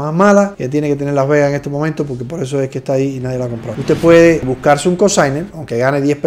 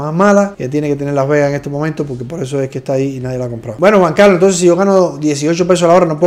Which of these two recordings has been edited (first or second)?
first